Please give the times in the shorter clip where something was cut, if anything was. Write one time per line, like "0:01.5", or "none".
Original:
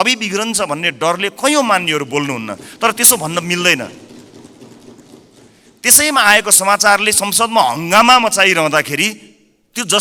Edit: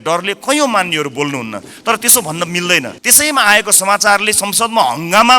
0:03.0